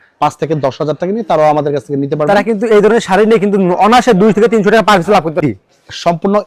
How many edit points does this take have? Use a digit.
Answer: 1